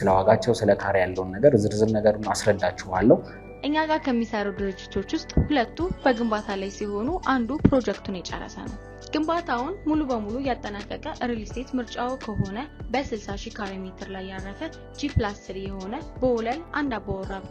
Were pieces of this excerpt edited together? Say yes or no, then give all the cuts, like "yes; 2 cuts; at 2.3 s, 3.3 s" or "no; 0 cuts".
no; 0 cuts